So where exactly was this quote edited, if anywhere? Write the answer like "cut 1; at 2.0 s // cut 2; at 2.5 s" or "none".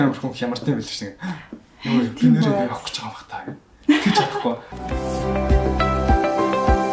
cut 1; at 4.7 s